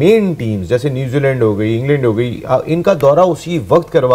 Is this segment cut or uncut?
uncut